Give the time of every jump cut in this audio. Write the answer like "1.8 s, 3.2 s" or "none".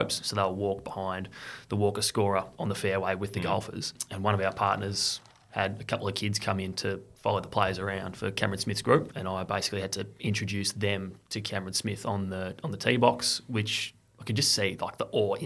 4.0 s, 9.1 s